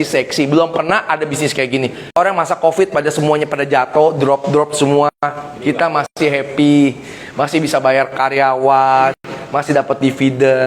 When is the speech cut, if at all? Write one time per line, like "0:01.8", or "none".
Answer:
0:02.0